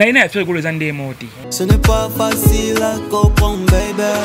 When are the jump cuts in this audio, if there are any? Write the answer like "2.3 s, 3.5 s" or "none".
1.5 s